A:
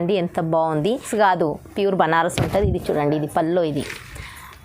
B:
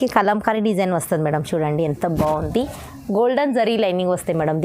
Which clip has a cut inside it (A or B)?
A